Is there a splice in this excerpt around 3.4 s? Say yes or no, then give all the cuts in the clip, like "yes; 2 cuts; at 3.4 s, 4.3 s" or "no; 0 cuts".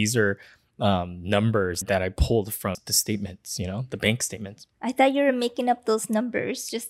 no; 1 cut; at 1.8 s